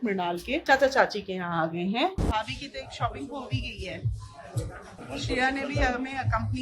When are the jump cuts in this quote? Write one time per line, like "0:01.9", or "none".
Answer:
0:02.2
0:05.0